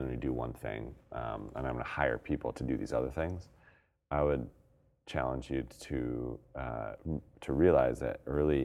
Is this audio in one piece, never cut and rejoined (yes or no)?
yes